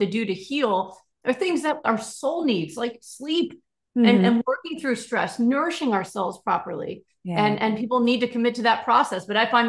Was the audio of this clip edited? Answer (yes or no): no